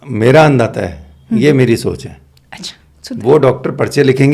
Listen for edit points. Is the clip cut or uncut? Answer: uncut